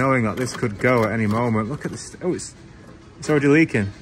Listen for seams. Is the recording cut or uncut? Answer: uncut